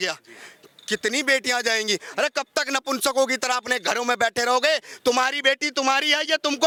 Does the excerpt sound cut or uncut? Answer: uncut